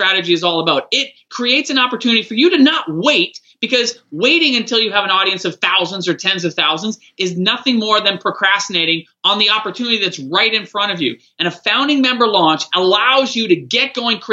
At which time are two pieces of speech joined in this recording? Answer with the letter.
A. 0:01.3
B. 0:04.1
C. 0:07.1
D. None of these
A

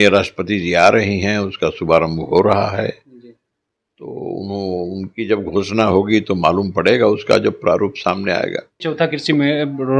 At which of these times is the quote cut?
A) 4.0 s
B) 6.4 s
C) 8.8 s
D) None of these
C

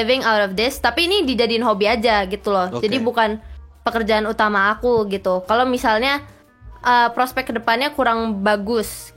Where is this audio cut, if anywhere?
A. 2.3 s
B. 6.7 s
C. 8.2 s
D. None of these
D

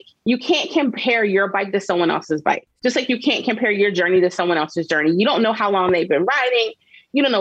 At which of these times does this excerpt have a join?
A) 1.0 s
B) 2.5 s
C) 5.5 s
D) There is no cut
B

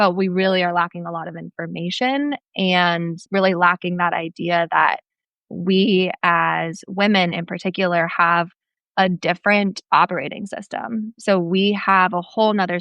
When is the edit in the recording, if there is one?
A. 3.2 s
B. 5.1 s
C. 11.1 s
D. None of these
A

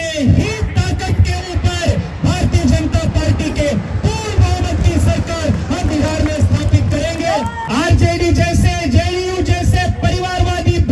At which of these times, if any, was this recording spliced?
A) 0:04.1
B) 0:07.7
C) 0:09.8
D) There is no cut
B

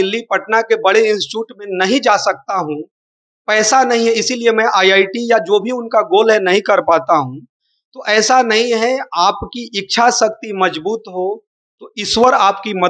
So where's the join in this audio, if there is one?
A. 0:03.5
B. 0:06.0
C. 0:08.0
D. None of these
D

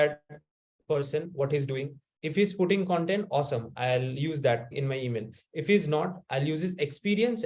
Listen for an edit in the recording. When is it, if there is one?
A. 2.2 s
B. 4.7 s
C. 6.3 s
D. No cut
B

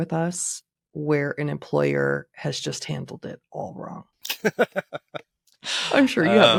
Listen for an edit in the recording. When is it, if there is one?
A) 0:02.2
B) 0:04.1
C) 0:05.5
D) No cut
D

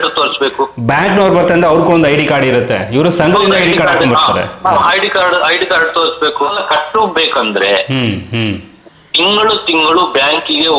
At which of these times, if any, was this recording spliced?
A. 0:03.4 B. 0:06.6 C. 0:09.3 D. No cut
B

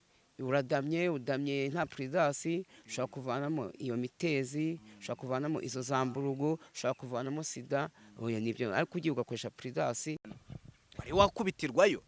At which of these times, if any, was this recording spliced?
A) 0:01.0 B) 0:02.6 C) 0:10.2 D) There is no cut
C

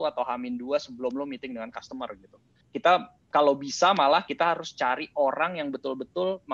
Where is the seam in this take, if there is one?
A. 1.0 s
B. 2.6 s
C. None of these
B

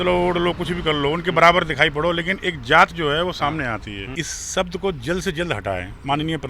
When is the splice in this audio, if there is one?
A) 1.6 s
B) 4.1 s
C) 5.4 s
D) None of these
B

